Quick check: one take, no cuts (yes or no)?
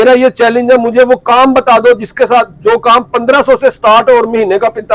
yes